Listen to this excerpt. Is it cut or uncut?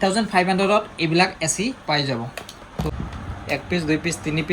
cut